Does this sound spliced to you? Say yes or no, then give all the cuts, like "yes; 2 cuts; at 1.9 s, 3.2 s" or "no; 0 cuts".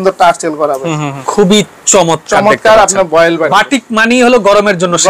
yes; 2 cuts; at 1.1 s, 3.5 s